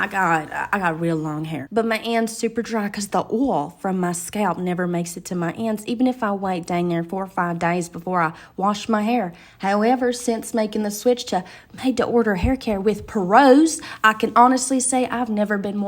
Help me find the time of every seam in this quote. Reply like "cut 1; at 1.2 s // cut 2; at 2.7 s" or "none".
cut 1; at 1.7 s